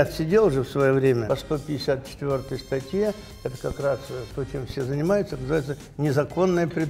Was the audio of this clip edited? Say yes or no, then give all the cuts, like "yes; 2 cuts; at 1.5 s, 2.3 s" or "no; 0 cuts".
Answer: yes; 1 cut; at 1.2 s